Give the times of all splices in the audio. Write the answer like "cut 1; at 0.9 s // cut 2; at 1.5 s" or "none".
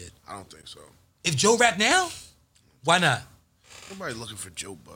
none

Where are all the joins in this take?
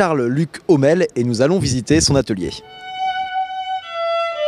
cut 1; at 1.7 s

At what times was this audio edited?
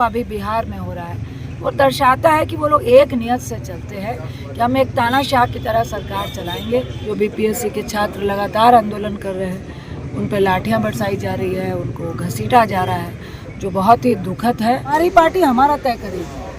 cut 1; at 7.0 s // cut 2; at 14.9 s

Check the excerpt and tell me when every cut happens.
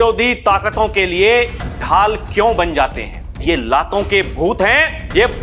cut 1; at 3.4 s

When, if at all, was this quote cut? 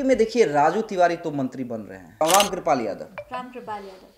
cut 1; at 2.2 s

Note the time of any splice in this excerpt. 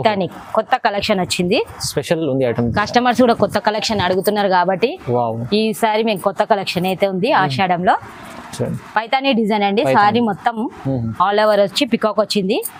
none

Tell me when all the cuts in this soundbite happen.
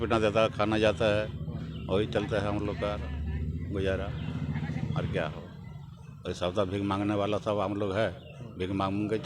none

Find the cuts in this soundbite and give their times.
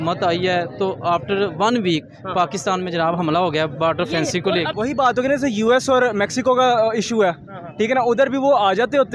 cut 1; at 4.7 s

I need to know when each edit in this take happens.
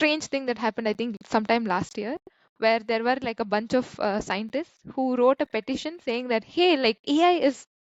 none

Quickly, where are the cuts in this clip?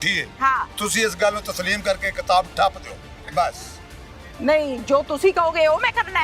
none

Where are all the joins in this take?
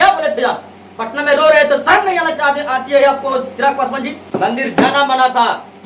cut 1; at 4.2 s

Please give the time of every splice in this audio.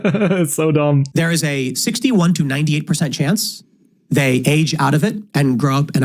cut 1; at 1.1 s

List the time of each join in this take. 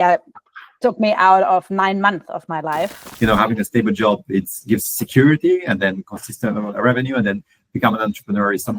cut 1; at 3.0 s

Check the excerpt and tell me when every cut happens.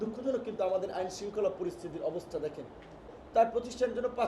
cut 1; at 3.1 s

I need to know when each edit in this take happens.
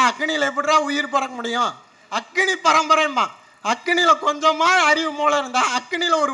none

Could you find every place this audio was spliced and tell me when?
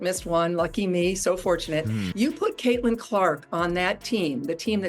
cut 1; at 2.1 s

